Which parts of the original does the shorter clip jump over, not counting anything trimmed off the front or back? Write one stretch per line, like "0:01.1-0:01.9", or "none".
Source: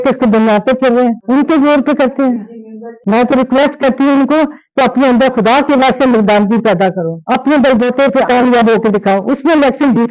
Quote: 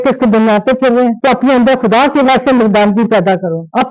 0:01.2-0:04.7

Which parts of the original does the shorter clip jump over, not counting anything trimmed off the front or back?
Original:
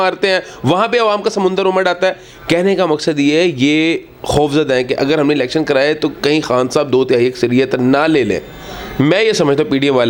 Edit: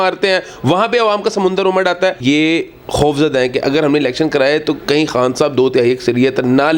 0:02.2-0:03.6

